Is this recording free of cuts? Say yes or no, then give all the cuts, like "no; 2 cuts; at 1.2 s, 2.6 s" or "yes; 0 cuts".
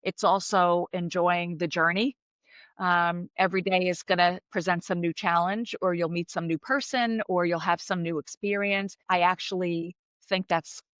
no; 1 cut; at 8.9 s